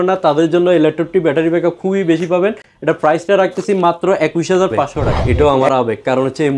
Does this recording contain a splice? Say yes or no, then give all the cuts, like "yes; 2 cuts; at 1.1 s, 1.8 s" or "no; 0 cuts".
yes; 1 cut; at 5.2 s